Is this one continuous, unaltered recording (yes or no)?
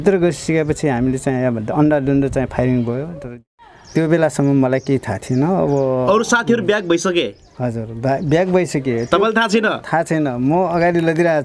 no